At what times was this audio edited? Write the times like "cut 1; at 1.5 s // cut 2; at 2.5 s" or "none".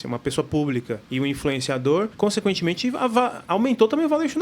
cut 1; at 1.0 s // cut 2; at 2.1 s // cut 3; at 3.4 s